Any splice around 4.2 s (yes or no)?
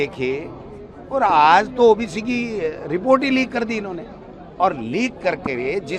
no